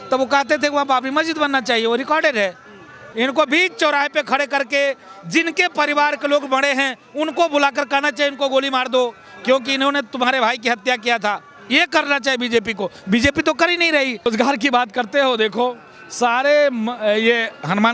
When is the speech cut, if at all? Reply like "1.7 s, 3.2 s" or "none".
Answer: 3.0 s, 14.3 s